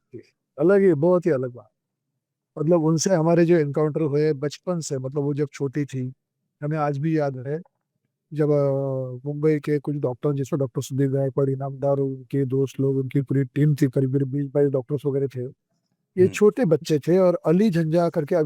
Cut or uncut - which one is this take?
uncut